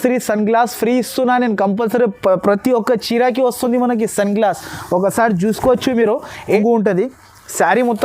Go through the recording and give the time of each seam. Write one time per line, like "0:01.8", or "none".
0:06.4